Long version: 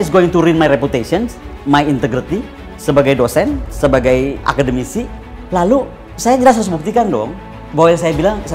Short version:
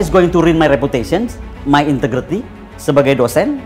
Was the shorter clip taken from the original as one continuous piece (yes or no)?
yes